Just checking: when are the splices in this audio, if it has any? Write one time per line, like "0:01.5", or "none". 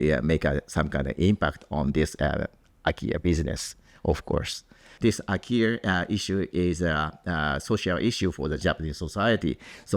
0:04.9
0:08.6